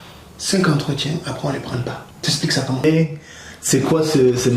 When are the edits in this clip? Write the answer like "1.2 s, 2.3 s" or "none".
2.8 s